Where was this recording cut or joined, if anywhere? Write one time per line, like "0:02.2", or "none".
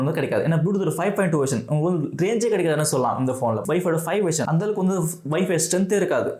0:03.6